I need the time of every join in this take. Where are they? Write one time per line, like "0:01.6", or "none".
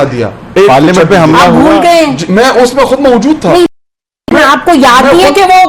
none